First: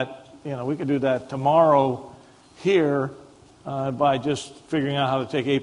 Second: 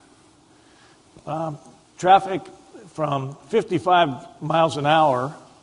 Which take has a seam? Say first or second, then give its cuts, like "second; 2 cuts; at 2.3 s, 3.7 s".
second; 1 cut; at 4.3 s